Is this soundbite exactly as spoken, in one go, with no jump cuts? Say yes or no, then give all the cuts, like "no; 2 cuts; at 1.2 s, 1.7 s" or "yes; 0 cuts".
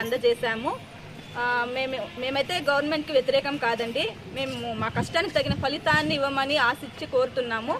yes; 0 cuts